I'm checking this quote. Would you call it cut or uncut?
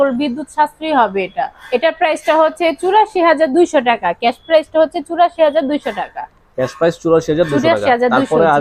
uncut